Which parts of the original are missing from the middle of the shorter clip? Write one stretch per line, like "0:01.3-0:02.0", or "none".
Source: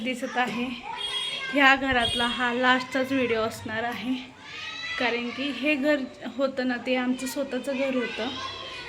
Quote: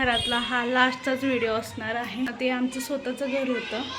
0:04.2-0:06.8